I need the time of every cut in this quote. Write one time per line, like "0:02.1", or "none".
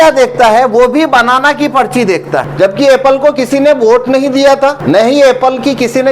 0:02.5
0:04.8